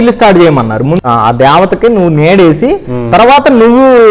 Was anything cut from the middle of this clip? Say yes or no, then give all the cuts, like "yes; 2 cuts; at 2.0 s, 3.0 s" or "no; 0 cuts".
yes; 1 cut; at 1.0 s